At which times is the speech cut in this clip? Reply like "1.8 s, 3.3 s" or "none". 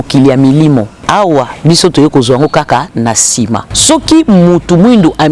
1.0 s, 3.7 s